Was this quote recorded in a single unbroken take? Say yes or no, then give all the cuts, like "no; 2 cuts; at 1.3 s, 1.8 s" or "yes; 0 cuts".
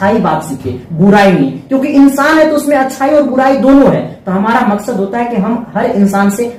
yes; 0 cuts